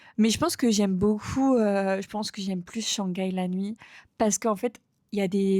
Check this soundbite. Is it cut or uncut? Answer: uncut